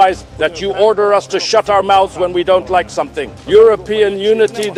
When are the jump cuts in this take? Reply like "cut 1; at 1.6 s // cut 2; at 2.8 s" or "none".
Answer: none